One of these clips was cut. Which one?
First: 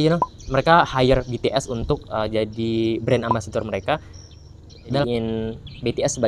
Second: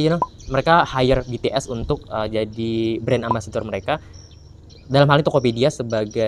first; 1 cut; at 4.9 s

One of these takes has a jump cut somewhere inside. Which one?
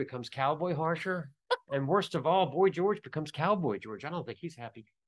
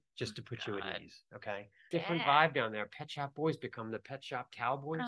second; 1 cut; at 1.8 s

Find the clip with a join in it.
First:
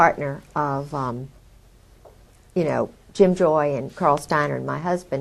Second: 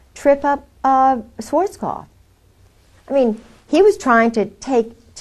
first; 1 cut; at 2.5 s

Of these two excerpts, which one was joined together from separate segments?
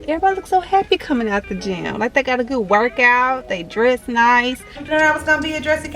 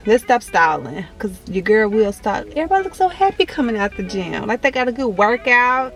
first; 1 cut; at 4.8 s

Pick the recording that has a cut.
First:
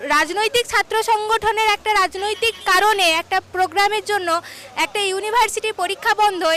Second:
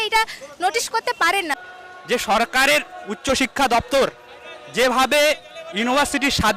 second; 1 cut; at 1.6 s

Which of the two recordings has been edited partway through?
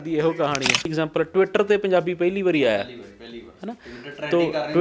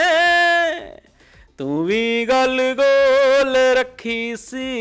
first; 1 cut; at 0.9 s

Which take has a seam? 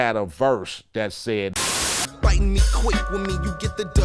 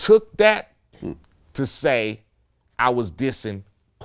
first; 1 cut; at 1.6 s

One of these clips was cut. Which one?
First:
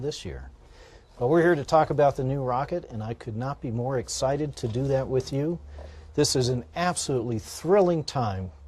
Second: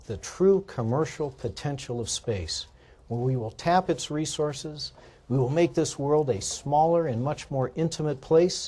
second; 1 cut; at 7.2 s

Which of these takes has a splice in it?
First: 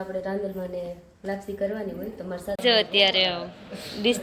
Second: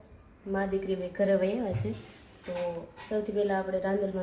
first; 1 cut; at 2.6 s

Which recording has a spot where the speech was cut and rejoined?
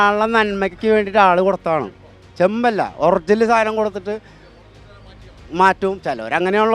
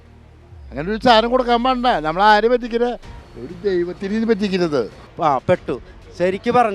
second; 1 cut; at 5.0 s

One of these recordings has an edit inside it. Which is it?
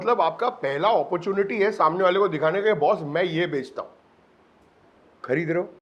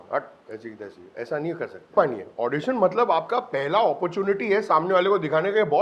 second; 1 cut; at 1.9 s

